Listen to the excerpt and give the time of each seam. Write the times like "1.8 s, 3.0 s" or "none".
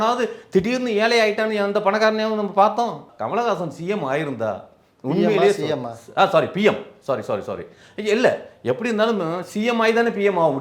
3.1 s